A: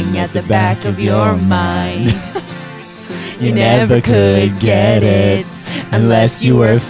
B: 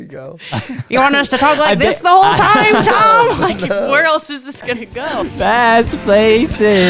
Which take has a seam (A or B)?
B